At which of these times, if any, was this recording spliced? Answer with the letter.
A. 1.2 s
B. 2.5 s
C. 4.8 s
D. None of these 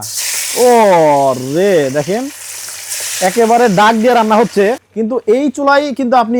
C